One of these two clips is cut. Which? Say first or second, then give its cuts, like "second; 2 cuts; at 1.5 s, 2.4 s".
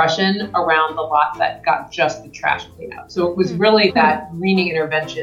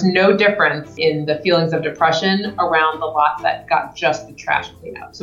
second; 1 cut; at 0.9 s